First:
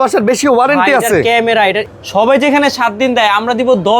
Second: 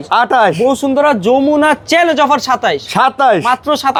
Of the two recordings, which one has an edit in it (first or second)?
first